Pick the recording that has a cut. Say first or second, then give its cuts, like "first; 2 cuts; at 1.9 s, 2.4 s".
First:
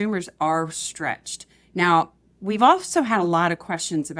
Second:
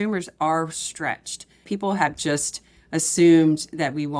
second; 1 cut; at 1.6 s